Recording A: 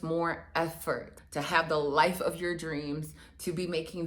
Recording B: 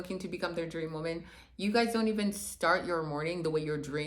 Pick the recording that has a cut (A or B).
A